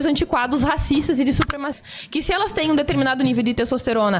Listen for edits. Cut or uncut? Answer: cut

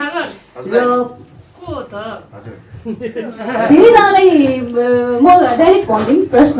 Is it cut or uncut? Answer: uncut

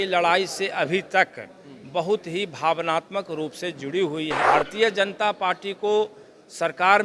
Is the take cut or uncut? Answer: cut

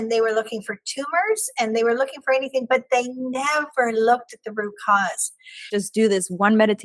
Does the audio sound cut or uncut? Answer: cut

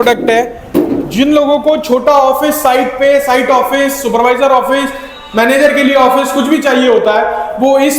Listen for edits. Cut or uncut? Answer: uncut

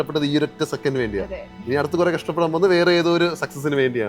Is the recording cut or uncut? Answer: uncut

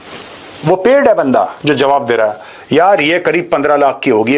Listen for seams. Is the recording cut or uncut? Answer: uncut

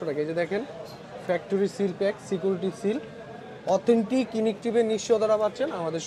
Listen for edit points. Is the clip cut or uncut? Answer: uncut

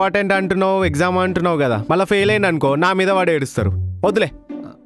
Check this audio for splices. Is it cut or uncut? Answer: uncut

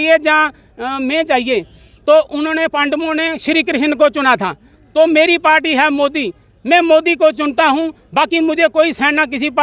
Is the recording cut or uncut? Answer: uncut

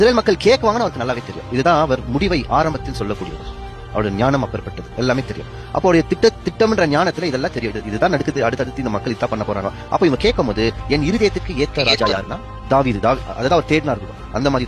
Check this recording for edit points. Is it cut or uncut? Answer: uncut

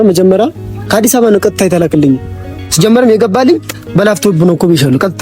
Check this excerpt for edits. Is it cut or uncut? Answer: uncut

